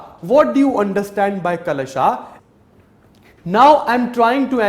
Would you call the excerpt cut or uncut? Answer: cut